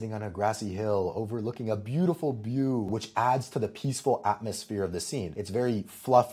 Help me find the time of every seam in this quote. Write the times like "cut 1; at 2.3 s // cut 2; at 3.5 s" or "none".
cut 1; at 2.9 s // cut 2; at 5.4 s